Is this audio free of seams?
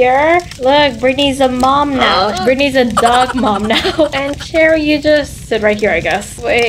yes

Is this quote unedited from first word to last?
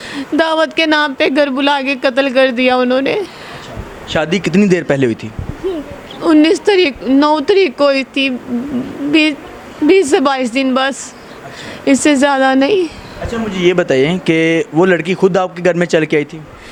yes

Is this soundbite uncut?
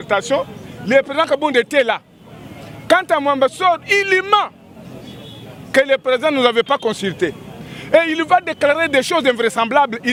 yes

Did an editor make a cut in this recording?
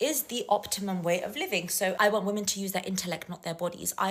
yes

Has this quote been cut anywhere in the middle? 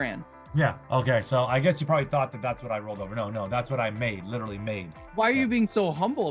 yes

